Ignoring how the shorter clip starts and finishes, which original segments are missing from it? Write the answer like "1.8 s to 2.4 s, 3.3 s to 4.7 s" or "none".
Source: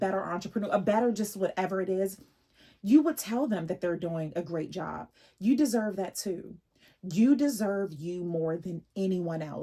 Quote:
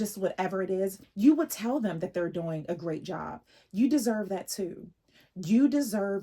2.2 s to 2.7 s